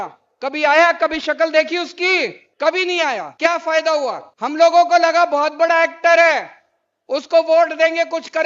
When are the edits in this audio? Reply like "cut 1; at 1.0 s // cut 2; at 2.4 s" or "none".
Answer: cut 1; at 2.4 s // cut 2; at 3.3 s // cut 3; at 4.3 s